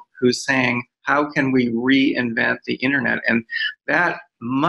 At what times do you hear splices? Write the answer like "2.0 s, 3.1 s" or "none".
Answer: none